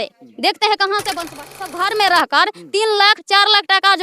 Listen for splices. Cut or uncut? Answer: cut